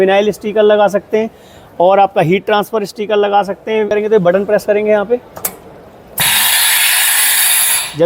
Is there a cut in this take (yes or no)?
yes